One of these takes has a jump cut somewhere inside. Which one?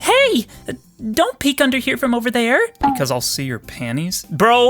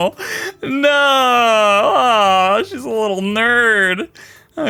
first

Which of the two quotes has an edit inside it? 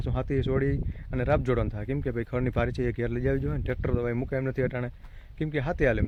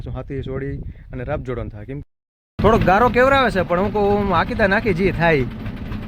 second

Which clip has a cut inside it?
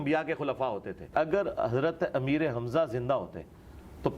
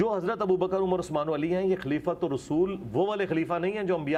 first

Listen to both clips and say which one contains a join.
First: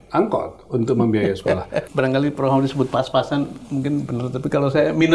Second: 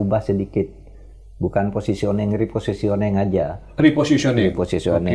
first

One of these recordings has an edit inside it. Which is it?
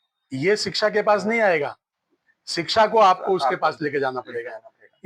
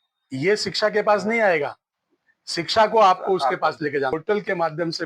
second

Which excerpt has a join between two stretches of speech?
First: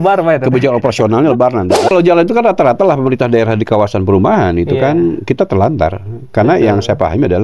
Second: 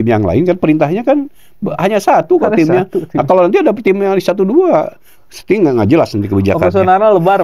first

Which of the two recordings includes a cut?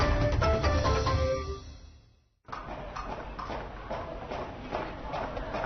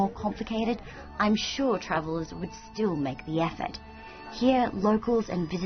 first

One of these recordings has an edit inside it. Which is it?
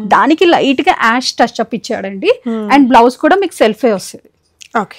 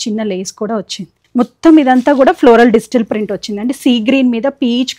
second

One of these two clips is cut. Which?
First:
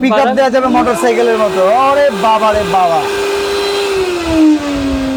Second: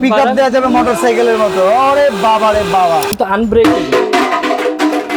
second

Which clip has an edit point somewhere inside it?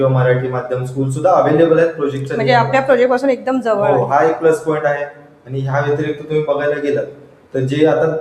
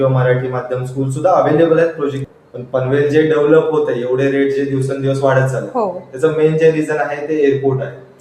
second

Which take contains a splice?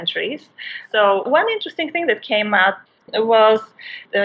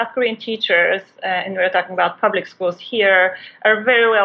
first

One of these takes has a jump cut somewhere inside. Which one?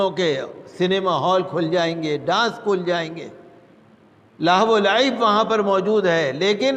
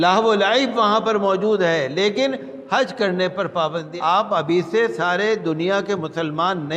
second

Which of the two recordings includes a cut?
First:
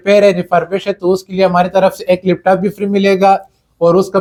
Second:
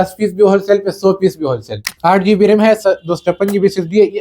second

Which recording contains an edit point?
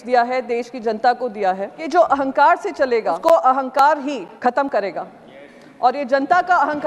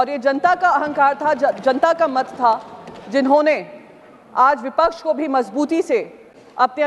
first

